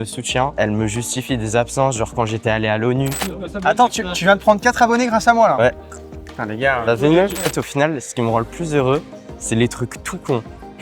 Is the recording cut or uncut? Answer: cut